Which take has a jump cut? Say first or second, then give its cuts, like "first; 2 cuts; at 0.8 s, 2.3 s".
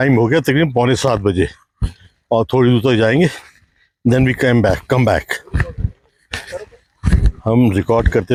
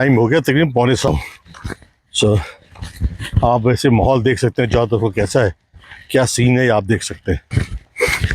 second; 2 cuts; at 1.1 s, 7.5 s